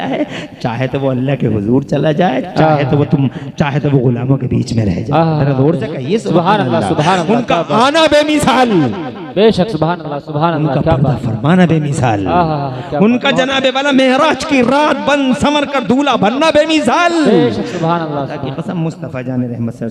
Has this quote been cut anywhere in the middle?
no; 0 cuts

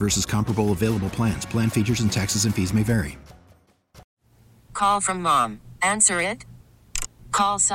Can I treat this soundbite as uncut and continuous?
no; 1 cut; at 4.1 s

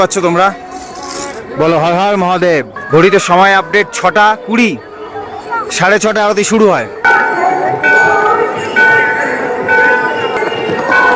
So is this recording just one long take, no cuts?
no; 3 cuts; at 2.7 s, 7.0 s, 10.4 s

